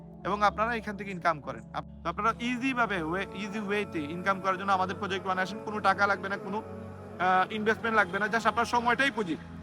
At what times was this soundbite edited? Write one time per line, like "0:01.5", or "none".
0:01.7